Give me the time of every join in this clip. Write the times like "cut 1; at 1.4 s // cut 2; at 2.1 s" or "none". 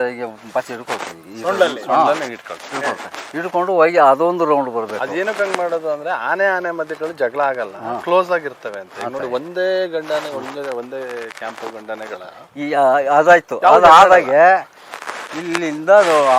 none